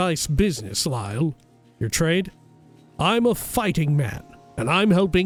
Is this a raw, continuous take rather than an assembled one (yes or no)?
yes